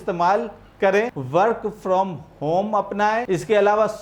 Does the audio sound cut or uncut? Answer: cut